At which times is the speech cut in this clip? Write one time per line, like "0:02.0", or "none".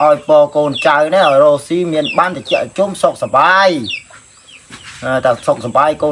none